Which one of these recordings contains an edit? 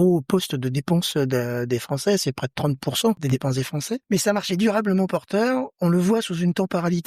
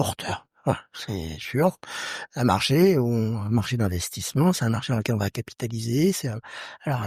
first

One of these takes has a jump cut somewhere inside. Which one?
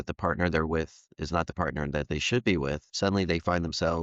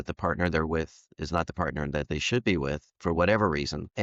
first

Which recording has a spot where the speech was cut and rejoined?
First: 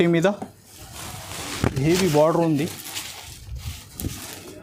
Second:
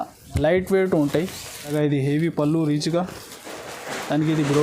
second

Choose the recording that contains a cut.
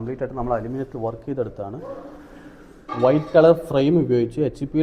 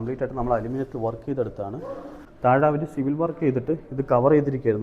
second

